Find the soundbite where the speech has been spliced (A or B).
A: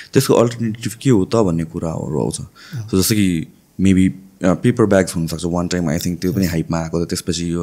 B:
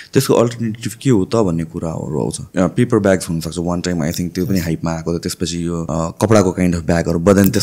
B